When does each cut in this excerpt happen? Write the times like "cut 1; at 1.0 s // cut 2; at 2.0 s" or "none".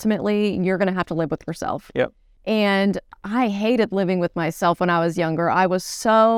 cut 1; at 2.3 s